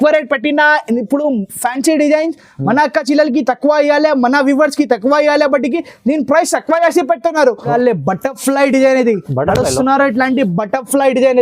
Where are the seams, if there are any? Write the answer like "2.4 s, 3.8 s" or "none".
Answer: 7.6 s